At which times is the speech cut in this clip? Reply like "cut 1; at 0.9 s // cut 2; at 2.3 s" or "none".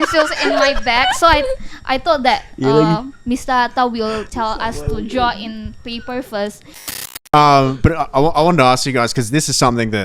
cut 1; at 7.0 s